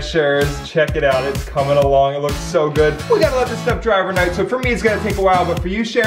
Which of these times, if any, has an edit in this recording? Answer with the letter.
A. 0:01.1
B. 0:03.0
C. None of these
B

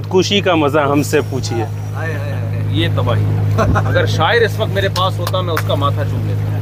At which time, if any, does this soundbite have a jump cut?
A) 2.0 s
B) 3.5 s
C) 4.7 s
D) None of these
D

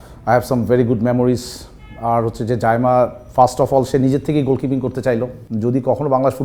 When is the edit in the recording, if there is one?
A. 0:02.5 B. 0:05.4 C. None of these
B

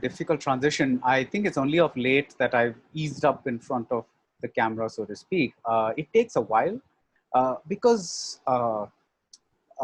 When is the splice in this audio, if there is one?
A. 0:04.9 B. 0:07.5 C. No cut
C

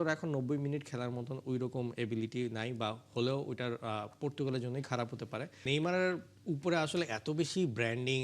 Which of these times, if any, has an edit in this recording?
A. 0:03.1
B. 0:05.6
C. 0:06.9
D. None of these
B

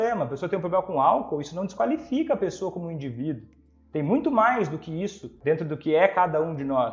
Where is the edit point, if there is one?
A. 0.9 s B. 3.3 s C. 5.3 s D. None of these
C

